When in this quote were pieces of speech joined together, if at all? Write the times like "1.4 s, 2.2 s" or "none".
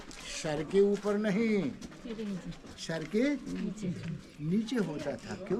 none